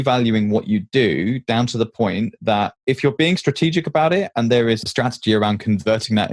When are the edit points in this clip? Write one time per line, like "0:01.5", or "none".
none